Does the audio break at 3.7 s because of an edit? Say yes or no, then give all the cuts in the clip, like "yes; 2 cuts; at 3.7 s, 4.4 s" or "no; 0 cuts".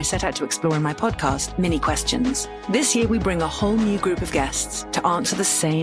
no; 1 cut; at 1.3 s